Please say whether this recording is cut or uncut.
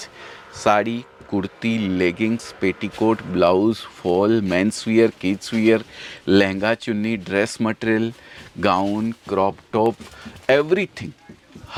uncut